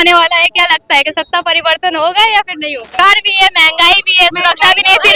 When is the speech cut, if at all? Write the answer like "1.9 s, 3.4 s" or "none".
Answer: 2.9 s

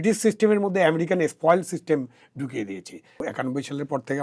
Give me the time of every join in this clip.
3.2 s

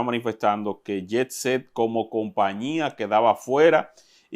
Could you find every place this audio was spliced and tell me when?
none

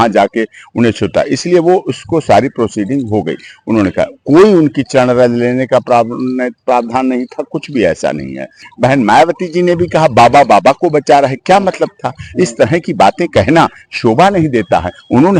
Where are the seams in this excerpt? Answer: 8.6 s

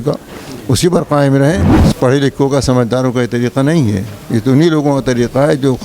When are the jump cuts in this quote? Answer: 1.8 s

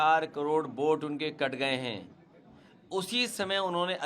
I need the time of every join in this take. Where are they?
none

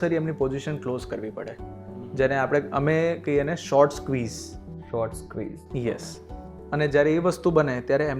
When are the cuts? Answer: none

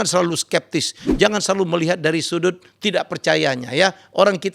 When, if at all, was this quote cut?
none

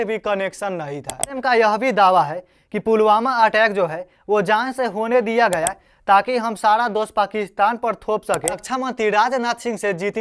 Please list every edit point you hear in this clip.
1.4 s, 8.6 s

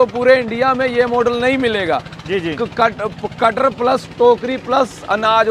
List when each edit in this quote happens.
none

